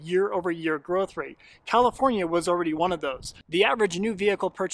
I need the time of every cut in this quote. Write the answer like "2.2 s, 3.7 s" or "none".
3.4 s